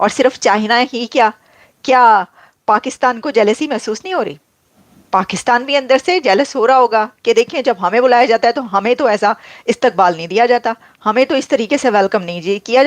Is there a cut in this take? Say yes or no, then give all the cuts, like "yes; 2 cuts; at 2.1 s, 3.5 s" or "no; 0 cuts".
no; 0 cuts